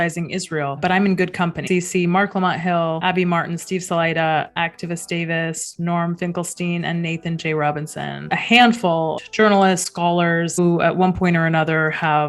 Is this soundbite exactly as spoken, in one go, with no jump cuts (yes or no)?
no